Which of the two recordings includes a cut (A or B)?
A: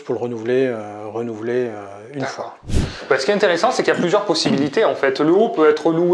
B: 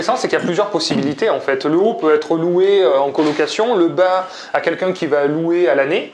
A